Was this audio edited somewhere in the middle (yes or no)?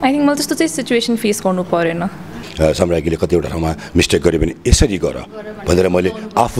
yes